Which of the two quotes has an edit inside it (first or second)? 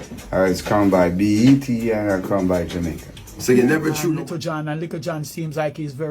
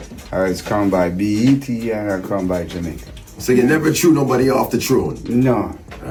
first